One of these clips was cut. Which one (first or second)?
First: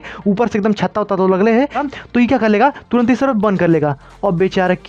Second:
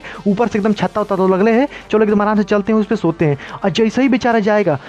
first